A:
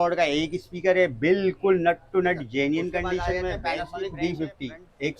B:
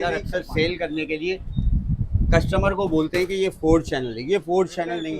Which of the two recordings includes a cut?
A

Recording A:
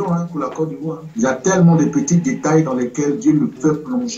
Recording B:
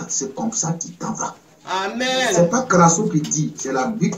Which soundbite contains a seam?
A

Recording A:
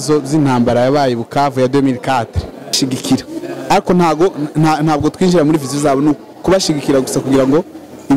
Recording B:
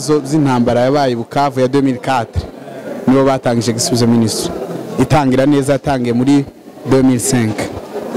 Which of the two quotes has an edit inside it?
A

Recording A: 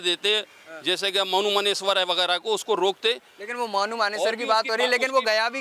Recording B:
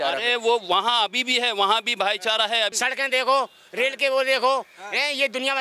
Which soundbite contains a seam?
B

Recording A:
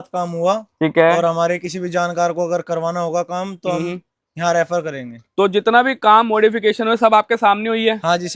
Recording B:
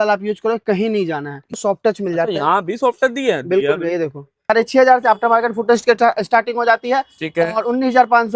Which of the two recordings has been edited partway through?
B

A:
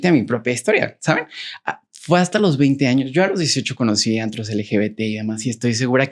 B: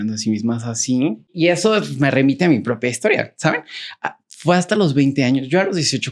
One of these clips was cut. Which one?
B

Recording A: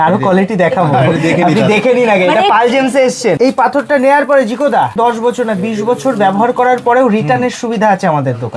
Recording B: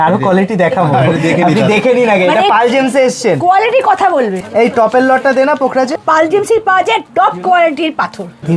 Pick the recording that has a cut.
A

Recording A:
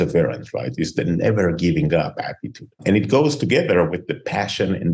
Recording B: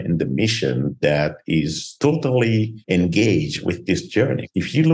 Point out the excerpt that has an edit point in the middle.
B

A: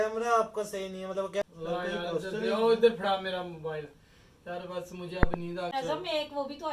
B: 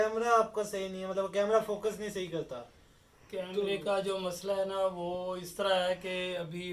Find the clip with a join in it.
A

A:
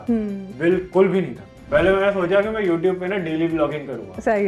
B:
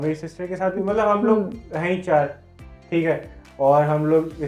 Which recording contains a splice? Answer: A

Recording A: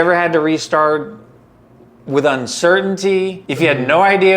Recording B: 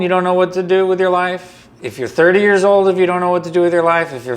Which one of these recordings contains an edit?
A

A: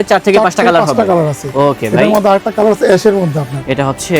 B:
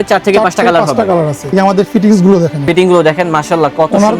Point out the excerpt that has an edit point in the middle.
B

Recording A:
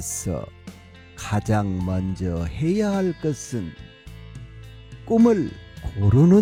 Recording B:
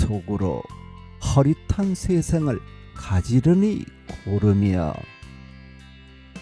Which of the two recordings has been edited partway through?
B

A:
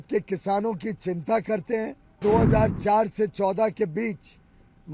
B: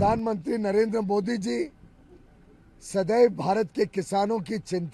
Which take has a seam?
A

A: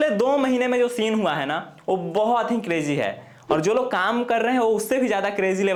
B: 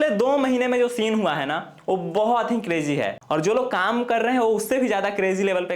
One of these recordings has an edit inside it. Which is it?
B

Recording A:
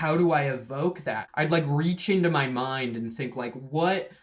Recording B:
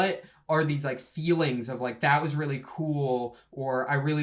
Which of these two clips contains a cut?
A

